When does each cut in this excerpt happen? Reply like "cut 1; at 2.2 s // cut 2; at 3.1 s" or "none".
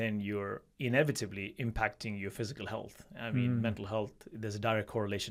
none

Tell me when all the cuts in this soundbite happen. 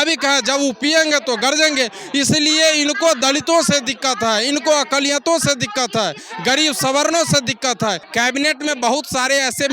cut 1; at 8.0 s

